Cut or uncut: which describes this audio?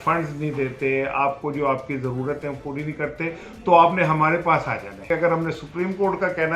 cut